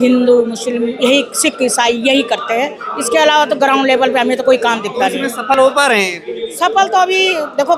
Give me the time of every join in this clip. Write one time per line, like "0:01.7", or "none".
none